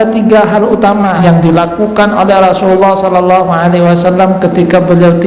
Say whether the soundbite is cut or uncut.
cut